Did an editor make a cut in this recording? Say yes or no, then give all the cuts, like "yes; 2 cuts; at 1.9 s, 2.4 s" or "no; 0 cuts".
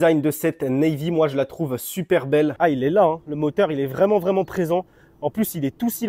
yes; 1 cut; at 2.5 s